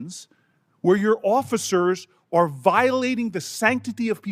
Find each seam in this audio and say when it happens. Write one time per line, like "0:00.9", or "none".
none